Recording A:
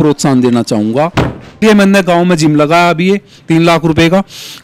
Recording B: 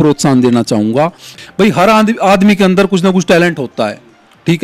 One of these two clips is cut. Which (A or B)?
A